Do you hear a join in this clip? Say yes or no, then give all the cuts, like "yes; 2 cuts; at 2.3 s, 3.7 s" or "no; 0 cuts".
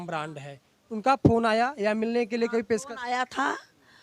no; 0 cuts